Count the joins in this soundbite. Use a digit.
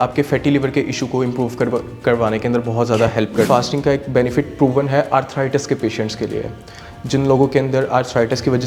1